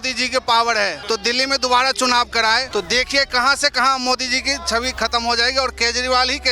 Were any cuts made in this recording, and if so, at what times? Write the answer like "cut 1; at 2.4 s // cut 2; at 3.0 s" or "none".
cut 1; at 1.0 s // cut 2; at 2.7 s